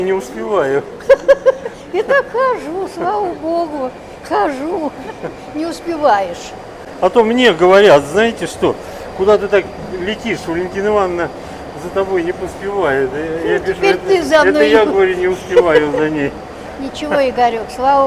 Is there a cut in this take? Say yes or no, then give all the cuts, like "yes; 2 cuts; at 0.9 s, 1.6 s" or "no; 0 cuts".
no; 0 cuts